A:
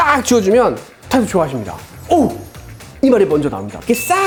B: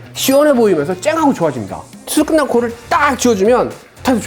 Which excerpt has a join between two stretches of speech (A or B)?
B